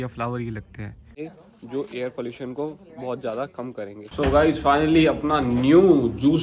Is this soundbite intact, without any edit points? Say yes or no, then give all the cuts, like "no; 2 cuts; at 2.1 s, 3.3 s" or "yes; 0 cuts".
no; 2 cuts; at 1.1 s, 4.0 s